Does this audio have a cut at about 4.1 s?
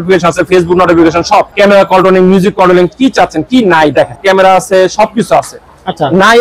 yes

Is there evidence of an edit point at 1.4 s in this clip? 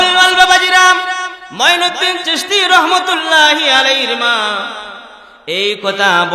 yes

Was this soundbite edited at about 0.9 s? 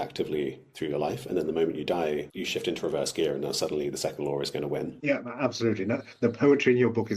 no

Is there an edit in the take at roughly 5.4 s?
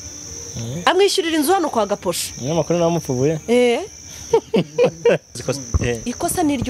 yes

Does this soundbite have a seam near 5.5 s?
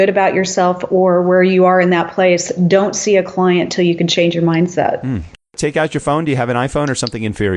yes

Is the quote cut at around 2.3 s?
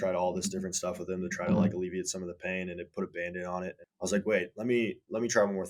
no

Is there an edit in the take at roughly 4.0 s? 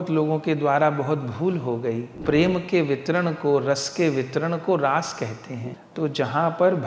no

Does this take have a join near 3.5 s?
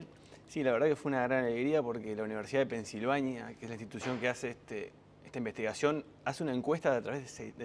no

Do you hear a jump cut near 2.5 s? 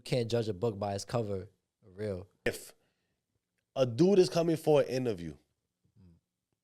yes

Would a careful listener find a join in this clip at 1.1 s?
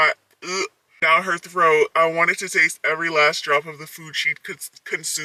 no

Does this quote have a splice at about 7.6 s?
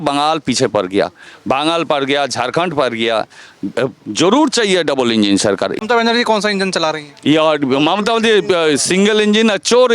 no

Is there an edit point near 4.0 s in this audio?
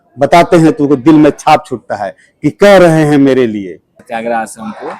yes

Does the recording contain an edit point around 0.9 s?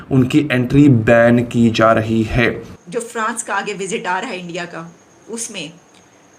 no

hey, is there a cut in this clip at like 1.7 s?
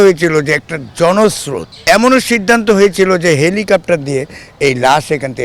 yes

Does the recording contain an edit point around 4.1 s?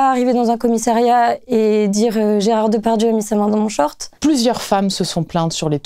yes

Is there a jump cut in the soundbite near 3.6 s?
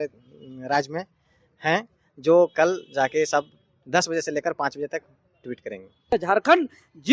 no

